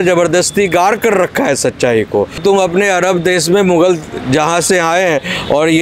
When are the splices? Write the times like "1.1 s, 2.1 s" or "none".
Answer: 2.3 s